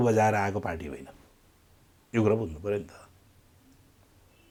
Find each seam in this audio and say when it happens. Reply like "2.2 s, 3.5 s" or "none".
none

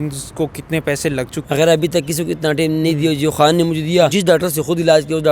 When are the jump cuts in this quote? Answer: 1.4 s, 4.1 s

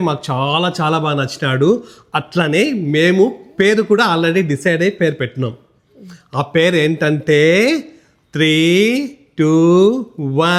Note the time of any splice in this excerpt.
none

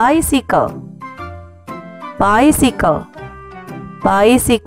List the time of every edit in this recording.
none

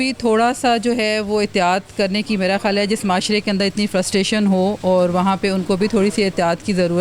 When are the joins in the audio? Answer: none

